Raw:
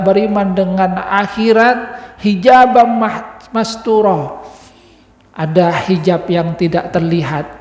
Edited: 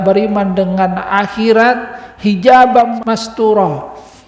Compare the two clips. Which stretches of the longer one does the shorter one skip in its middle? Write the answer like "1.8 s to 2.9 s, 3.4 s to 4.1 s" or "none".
3.0 s to 3.4 s